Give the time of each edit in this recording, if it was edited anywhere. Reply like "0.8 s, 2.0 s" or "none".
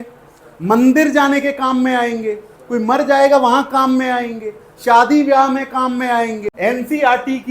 6.5 s